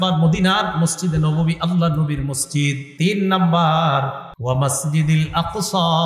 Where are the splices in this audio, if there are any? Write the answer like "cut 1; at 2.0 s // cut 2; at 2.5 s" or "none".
cut 1; at 2.8 s // cut 2; at 4.3 s